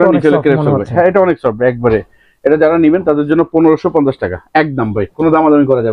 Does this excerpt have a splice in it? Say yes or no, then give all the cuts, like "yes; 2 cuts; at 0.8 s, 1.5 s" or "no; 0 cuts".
no; 0 cuts